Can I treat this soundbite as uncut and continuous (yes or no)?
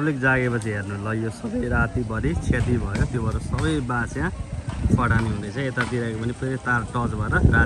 yes